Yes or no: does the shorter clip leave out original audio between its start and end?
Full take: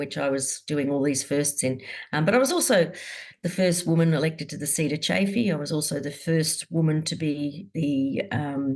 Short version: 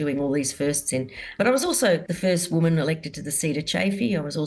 yes